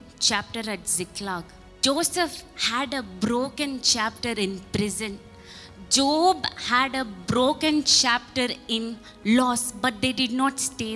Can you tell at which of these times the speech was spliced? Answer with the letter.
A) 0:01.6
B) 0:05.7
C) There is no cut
A